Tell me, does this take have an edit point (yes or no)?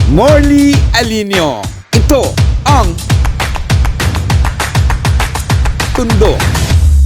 no